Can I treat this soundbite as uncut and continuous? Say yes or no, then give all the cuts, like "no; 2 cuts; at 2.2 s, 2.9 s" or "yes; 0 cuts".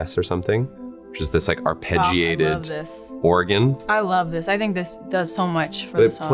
no; 1 cut; at 3.8 s